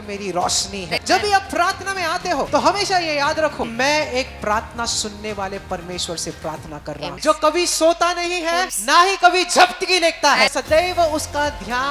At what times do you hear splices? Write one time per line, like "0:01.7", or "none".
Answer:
0:01.0
0:02.5
0:03.6
0:07.1
0:08.7
0:10.5